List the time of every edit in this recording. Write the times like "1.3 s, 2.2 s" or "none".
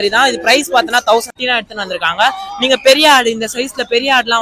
1.3 s